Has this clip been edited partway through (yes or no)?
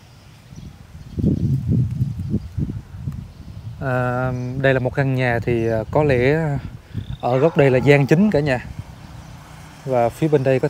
no